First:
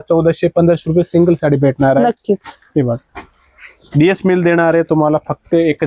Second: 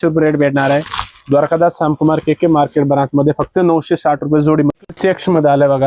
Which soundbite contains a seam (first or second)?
second